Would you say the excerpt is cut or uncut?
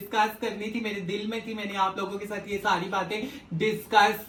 uncut